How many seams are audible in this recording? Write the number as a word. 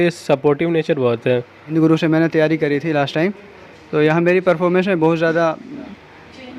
one